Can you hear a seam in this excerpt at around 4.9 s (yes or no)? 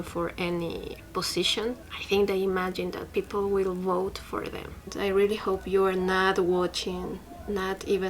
yes